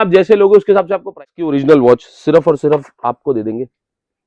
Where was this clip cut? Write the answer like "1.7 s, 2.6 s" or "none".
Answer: 1.2 s